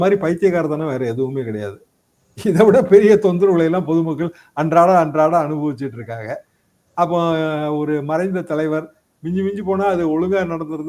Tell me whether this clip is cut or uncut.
uncut